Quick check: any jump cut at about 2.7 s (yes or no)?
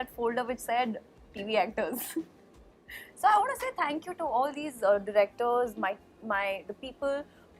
no